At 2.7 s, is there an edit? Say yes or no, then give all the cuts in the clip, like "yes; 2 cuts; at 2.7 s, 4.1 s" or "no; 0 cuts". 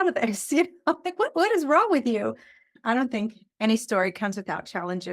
yes; 1 cut; at 2.7 s